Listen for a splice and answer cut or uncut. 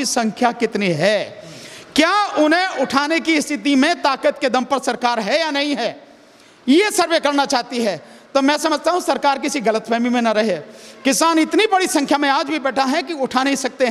uncut